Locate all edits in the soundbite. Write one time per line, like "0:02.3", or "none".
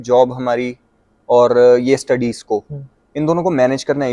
none